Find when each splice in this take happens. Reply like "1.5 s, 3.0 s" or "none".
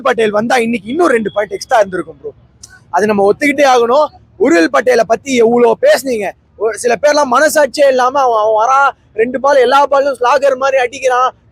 none

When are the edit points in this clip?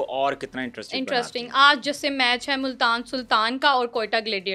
none

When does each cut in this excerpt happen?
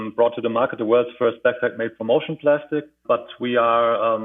3.0 s

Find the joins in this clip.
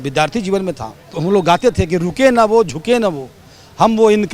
1.2 s

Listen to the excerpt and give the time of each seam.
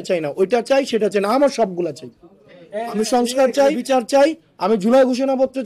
3.8 s

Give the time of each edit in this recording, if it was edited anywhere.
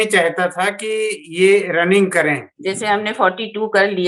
2.5 s

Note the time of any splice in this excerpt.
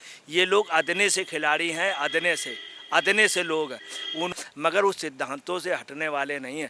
4.3 s

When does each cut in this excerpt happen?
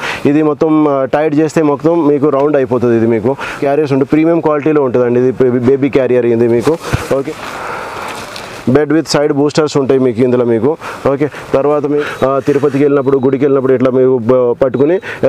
3.6 s, 7.4 s, 12.0 s

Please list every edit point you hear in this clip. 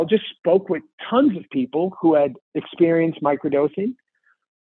0.9 s

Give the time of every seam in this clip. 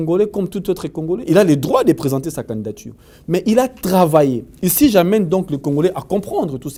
none

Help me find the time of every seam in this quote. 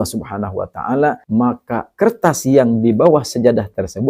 1.2 s

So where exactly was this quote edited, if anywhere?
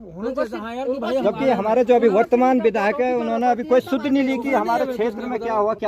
none

